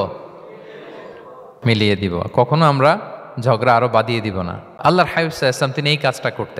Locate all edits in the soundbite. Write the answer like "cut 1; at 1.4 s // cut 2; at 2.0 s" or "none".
cut 1; at 1.4 s // cut 2; at 4.6 s

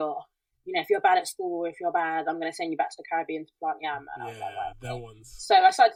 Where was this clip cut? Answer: none

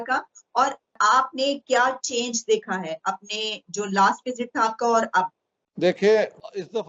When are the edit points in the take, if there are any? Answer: none

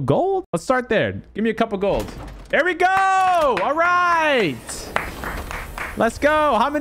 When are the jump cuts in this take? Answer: none

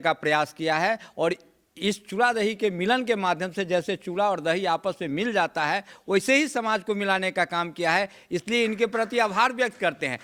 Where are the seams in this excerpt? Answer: none

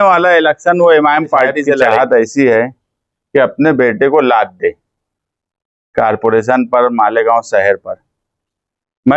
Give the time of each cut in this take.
cut 1; at 1.8 s

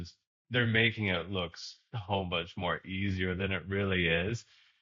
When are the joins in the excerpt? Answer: none

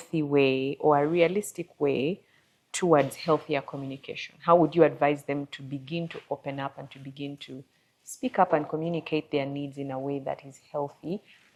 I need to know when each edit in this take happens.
none

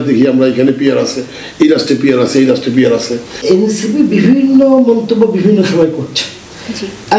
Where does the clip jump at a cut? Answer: cut 1; at 3.3 s

